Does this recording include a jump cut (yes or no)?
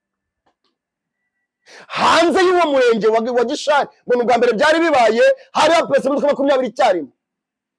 no